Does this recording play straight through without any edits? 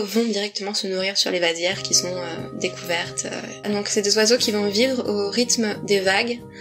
no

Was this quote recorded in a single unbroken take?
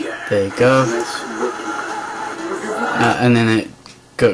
no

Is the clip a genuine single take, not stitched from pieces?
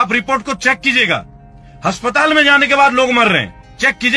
yes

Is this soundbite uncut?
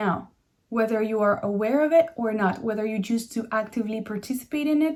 yes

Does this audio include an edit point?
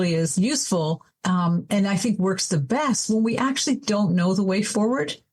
no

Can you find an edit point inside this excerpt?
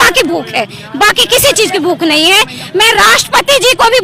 no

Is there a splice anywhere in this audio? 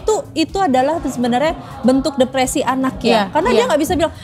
no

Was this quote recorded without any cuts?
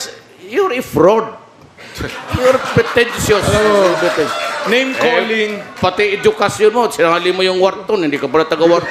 yes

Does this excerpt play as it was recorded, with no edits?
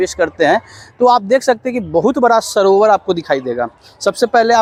yes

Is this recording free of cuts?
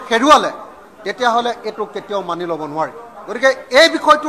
no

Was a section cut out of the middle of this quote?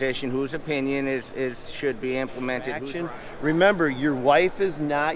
yes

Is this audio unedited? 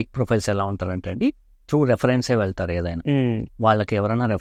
yes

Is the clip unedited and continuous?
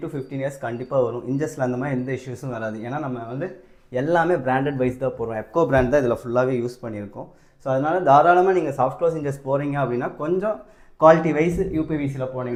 yes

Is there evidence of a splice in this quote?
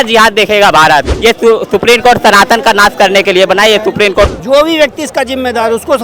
yes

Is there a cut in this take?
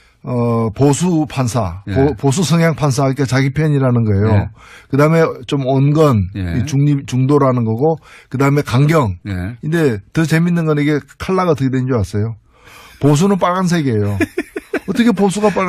no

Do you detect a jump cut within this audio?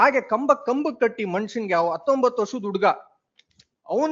no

